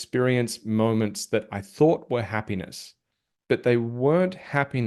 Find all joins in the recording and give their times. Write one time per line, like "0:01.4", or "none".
none